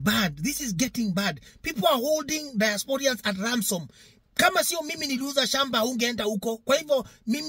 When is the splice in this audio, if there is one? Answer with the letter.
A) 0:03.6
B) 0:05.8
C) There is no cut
C